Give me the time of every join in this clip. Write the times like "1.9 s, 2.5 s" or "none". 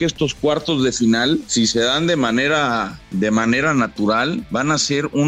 1.5 s, 3.0 s, 4.4 s